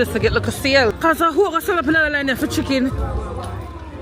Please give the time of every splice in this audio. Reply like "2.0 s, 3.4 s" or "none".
0.9 s